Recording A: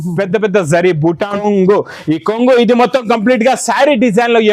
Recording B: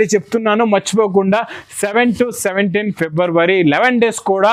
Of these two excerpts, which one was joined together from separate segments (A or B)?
A